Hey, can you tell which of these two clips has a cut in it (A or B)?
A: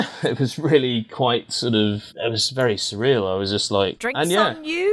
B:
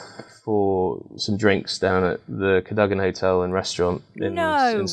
A